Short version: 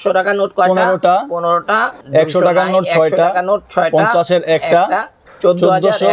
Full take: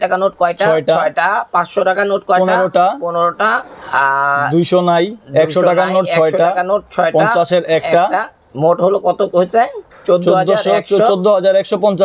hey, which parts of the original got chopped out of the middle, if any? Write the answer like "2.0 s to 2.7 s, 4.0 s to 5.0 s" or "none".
3.7 s to 5.2 s, 8.4 s to 9.9 s